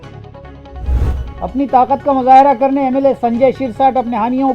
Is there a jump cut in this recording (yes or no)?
yes